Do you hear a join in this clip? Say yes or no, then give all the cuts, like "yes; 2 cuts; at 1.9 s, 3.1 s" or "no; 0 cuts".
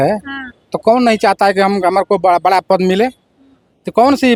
no; 0 cuts